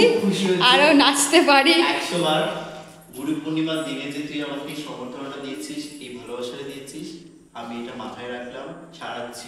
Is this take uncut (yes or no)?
yes